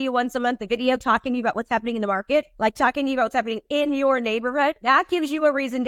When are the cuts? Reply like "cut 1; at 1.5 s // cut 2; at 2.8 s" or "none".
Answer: cut 1; at 2.5 s // cut 2; at 4.8 s